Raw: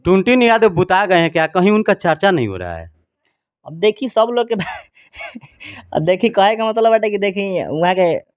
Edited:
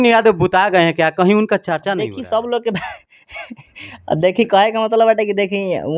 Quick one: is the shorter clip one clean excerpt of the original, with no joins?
no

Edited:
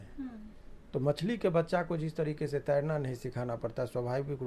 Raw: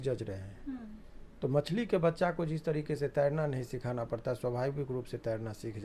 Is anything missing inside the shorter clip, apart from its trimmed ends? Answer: no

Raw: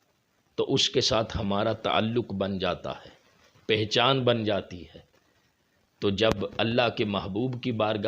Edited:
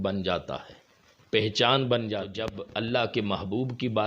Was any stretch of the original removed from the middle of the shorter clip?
yes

